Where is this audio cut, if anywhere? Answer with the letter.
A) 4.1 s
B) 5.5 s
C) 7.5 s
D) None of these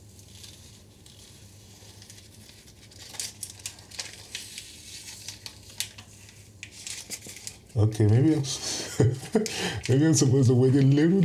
D